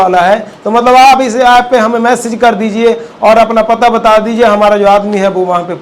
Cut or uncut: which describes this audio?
uncut